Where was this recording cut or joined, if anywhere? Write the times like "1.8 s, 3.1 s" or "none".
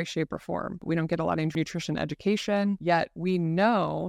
0.8 s, 1.5 s, 2.8 s

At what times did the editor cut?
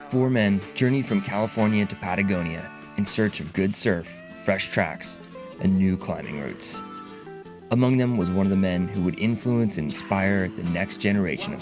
2.0 s

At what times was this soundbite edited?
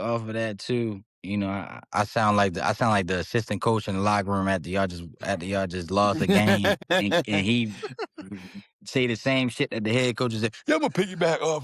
1.1 s, 6.8 s

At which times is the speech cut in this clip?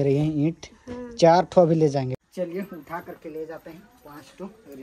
2.2 s

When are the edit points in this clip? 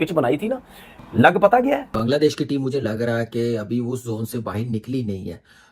1.9 s

